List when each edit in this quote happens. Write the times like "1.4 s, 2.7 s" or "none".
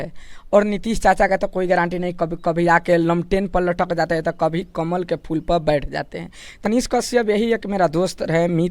6.6 s